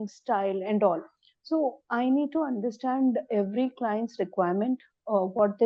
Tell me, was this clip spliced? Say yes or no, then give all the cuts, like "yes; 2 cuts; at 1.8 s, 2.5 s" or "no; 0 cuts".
no; 0 cuts